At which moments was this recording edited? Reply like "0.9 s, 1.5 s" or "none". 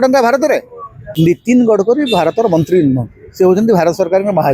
1.0 s